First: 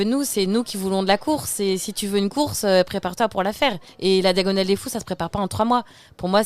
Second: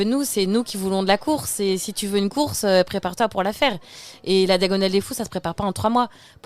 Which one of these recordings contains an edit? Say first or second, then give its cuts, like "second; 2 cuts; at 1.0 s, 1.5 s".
first; 1 cut; at 3.9 s